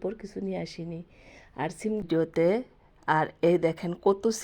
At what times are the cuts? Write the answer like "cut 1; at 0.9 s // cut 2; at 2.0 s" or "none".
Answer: cut 1; at 2.0 s